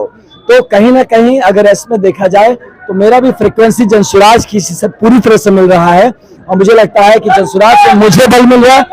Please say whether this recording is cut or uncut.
uncut